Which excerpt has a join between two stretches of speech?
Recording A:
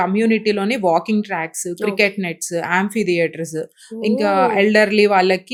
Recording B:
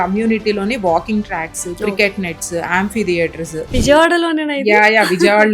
B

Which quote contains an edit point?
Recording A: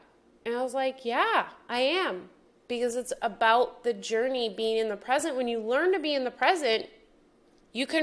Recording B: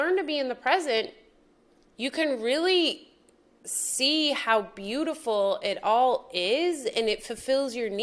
A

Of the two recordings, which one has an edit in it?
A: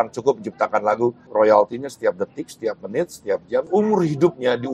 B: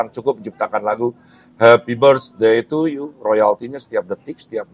A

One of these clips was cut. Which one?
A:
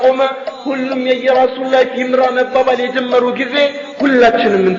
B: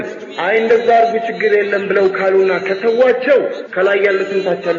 B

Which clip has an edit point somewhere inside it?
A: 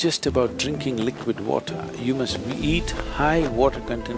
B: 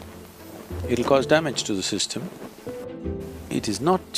B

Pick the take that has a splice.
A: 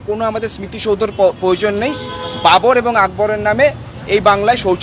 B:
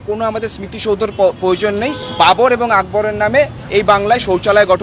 B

